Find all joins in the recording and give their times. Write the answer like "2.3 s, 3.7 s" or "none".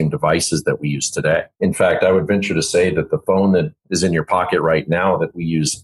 1.5 s, 3.8 s